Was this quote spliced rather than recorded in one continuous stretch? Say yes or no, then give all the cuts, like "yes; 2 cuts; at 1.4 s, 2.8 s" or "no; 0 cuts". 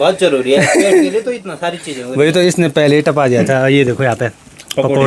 no; 0 cuts